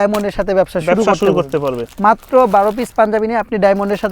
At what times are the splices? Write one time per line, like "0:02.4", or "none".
none